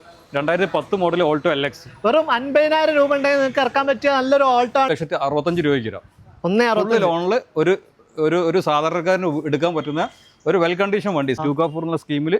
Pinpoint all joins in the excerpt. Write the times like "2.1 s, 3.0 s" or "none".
4.9 s, 11.4 s